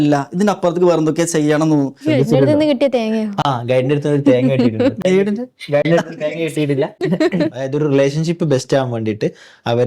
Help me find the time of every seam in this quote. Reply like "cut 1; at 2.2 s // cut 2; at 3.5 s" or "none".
cut 1; at 2.0 s // cut 2; at 7.6 s